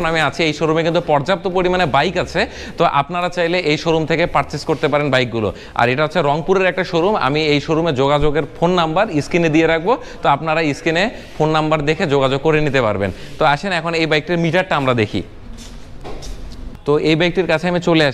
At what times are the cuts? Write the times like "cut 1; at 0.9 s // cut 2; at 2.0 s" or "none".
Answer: none